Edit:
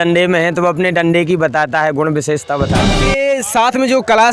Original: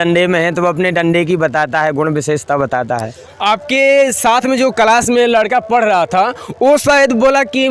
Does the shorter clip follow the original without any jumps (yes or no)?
no